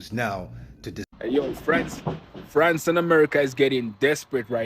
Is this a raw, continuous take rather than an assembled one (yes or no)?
no